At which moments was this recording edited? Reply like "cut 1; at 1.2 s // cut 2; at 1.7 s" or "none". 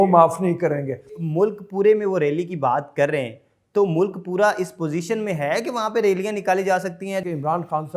cut 1; at 1.2 s // cut 2; at 7.2 s